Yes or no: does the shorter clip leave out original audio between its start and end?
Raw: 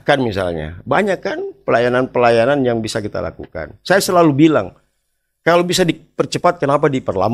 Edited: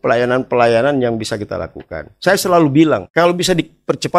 yes